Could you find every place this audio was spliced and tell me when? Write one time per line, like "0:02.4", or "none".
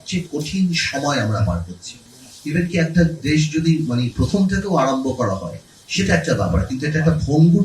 none